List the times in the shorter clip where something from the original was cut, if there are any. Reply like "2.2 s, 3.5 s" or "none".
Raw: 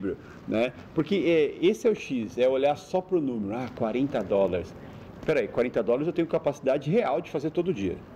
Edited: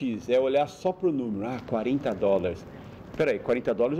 none